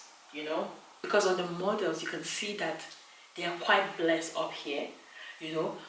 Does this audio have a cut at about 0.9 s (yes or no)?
yes